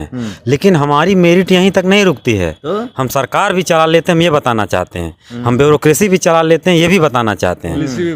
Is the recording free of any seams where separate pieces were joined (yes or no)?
yes